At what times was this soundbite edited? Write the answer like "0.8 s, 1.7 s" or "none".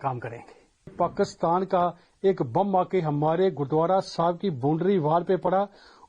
0.9 s